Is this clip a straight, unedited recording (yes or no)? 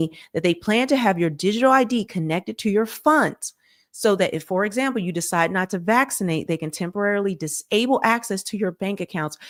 yes